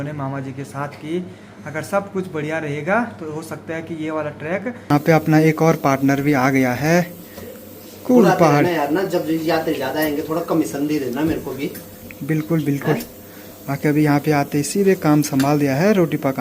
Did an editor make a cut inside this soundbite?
yes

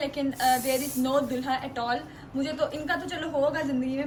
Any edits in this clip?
no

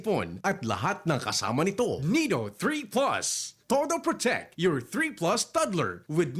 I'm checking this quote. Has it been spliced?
yes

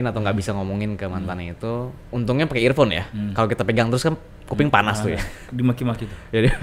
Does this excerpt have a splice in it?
yes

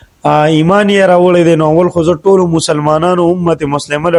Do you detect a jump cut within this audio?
no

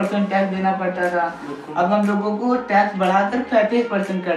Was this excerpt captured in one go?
yes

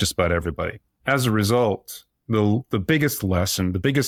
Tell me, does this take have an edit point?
no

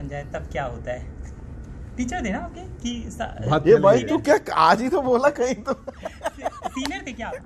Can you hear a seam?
no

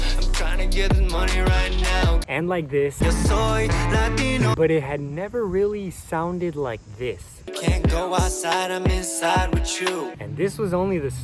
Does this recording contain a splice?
yes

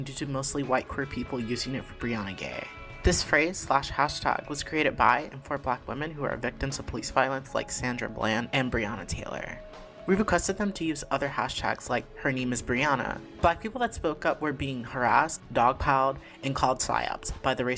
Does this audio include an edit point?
no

